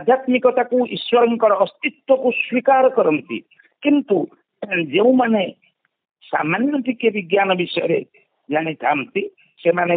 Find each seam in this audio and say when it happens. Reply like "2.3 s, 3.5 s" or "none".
none